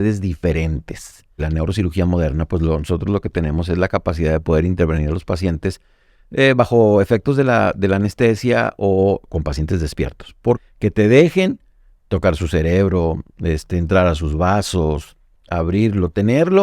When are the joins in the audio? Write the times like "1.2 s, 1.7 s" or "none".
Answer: 1.4 s, 10.6 s